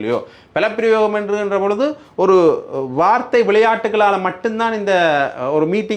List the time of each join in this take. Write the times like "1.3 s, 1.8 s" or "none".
none